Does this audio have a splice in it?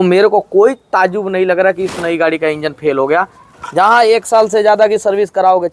yes; 1 cut; at 3.6 s

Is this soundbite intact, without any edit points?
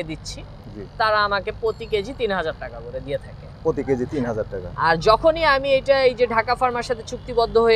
yes; 0 cuts

